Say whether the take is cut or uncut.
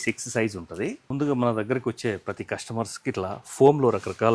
cut